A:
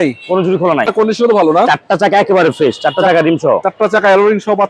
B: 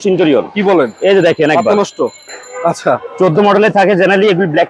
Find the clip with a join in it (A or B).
A